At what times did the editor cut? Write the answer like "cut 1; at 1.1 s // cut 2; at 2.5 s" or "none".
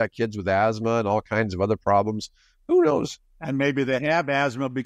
none